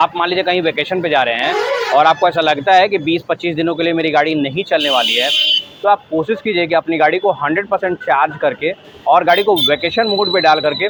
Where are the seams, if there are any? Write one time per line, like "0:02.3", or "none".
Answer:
none